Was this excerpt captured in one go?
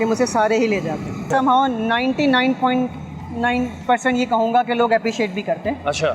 no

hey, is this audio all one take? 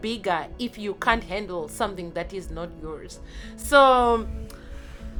yes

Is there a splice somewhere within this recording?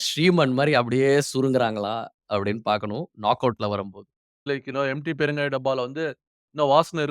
yes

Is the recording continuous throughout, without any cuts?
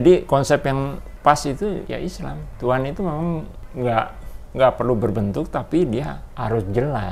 no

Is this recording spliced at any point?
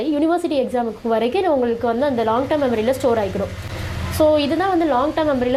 no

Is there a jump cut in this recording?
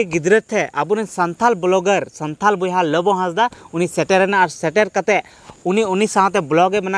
no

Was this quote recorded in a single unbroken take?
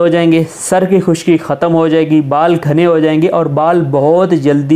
yes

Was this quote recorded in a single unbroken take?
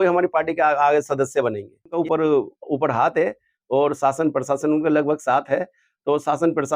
no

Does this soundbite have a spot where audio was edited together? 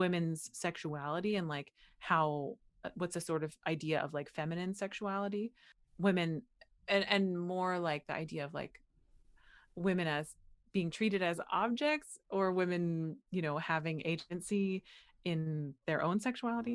no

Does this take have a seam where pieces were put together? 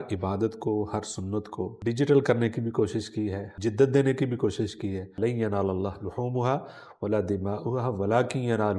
yes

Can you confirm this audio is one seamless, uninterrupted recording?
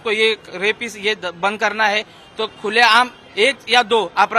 yes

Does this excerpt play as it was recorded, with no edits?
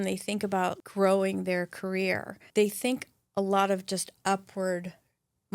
no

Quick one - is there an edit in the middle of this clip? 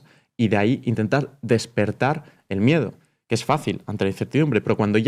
no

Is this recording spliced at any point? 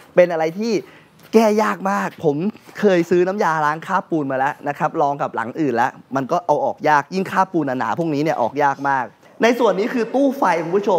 yes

